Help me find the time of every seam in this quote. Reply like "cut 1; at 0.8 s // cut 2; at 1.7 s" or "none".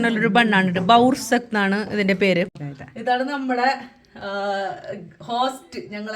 cut 1; at 2.6 s